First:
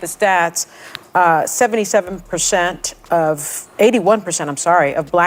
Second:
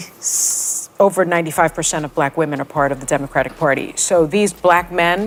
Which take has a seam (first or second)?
first